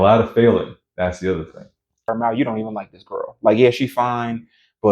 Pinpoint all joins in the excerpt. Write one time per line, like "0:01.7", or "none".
0:02.1